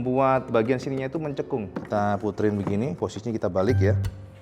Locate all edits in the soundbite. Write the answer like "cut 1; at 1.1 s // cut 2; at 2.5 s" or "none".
cut 1; at 1.7 s